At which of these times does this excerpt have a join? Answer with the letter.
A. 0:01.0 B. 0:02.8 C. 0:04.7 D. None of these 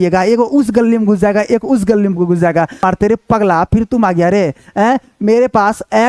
B